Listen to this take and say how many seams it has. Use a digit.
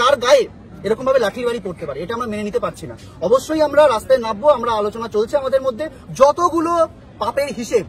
1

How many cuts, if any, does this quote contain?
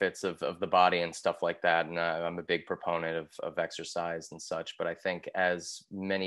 0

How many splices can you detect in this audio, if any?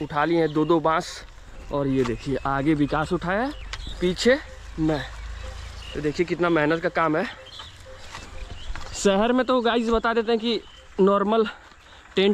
0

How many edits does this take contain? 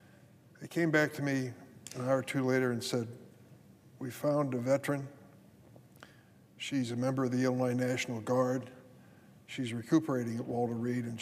2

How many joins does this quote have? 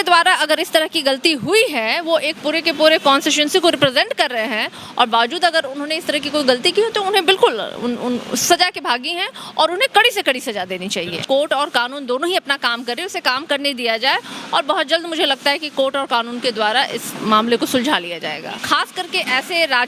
2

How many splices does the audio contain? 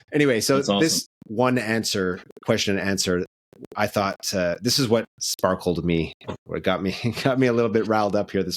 2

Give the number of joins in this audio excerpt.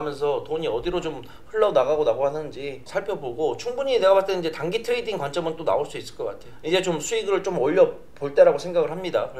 2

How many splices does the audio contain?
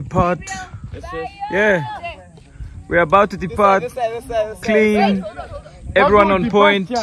0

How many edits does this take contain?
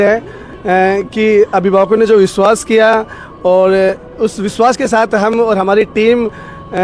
0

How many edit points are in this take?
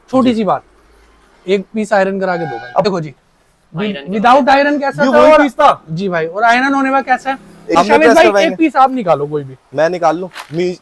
2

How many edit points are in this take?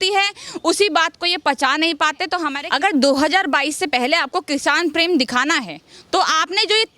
1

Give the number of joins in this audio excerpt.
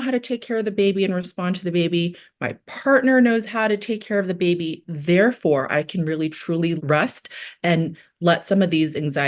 1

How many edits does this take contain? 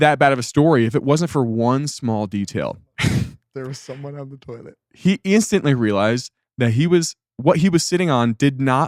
0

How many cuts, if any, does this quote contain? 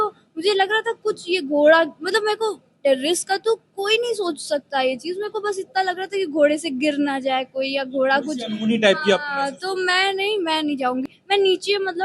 1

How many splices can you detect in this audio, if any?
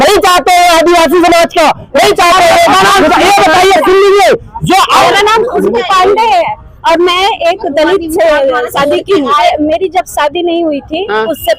2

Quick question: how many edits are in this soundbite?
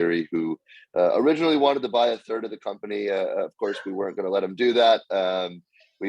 0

